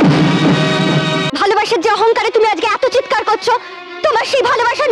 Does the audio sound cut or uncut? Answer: cut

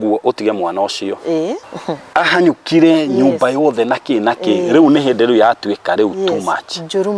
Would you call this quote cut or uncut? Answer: cut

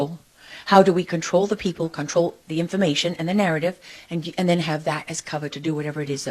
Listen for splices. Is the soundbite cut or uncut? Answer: uncut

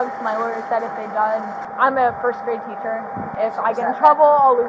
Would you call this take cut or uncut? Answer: cut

